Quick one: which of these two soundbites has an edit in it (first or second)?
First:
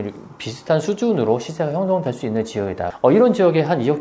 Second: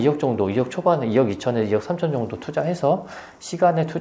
first